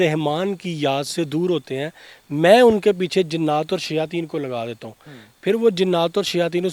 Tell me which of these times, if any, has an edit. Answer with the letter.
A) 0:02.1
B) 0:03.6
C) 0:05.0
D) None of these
D